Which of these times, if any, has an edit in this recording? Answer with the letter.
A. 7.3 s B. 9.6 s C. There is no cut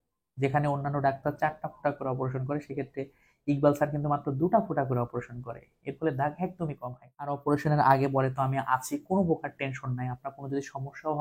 A